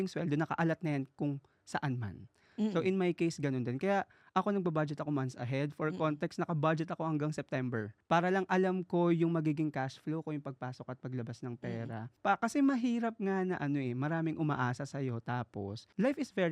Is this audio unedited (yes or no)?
yes